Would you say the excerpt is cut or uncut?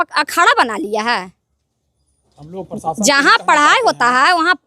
uncut